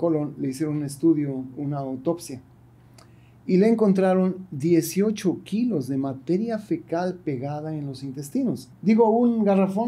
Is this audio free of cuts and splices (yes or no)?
no